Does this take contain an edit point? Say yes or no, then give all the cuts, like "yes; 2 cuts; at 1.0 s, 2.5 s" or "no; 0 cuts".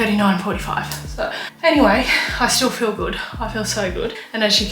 no; 0 cuts